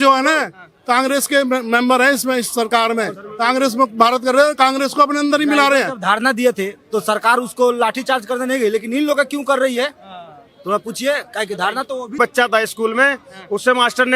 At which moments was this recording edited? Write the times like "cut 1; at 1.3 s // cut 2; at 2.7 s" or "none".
cut 1; at 12.2 s

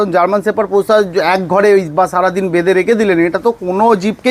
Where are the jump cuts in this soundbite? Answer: none

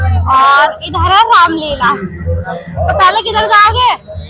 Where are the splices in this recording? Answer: none

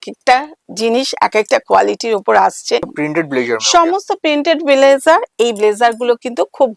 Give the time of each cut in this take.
cut 1; at 2.9 s

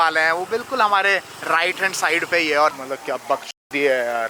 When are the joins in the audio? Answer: cut 1; at 2.8 s

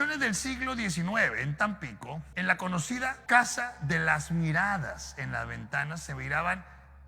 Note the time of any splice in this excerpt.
cut 1; at 2.3 s // cut 2; at 3.2 s

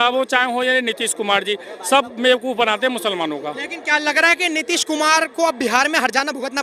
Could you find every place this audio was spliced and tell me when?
none

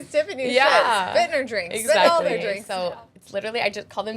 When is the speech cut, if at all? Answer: cut 1; at 2.7 s

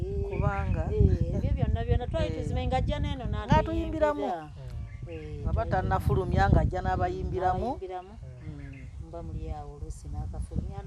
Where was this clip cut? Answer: none

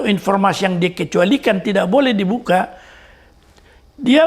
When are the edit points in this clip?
none

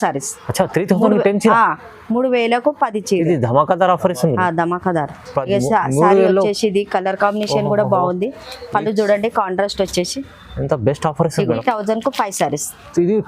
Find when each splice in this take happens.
cut 1; at 11.5 s

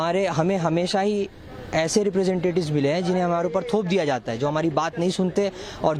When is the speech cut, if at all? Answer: none

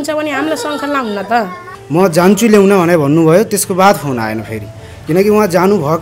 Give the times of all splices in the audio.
cut 1; at 1.7 s

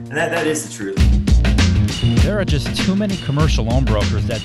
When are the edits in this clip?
cut 1; at 1.0 s

